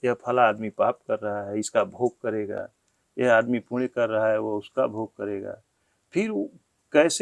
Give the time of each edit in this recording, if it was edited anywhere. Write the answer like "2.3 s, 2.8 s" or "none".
none

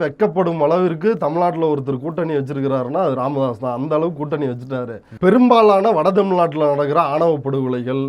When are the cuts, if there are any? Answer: 5.1 s

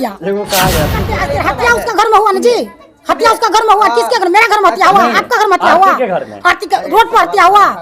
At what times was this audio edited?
1.2 s

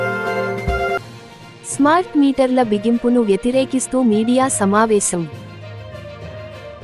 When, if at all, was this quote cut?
none

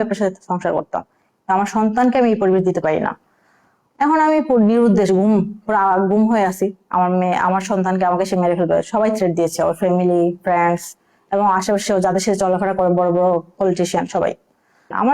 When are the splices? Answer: none

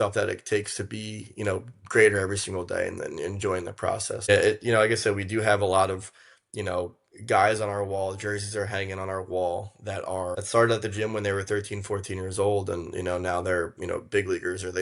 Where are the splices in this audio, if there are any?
4.3 s, 10.4 s

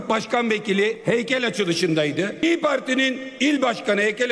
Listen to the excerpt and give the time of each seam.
1.0 s, 2.4 s

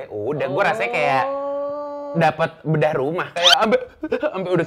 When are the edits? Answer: none

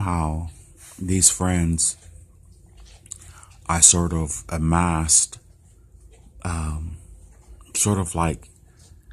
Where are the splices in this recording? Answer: 4.1 s

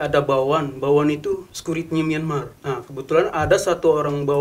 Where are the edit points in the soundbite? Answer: 1.5 s, 2.5 s

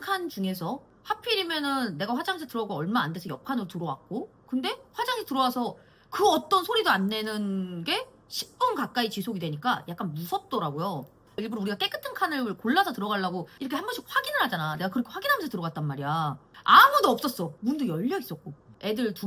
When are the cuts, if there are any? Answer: 11.4 s

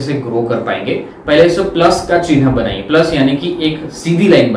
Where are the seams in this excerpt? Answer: 1.1 s

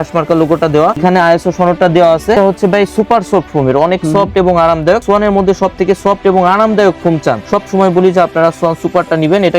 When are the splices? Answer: 1.0 s, 2.3 s, 5.0 s, 7.4 s

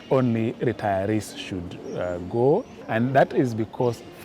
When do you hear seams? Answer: 2.8 s

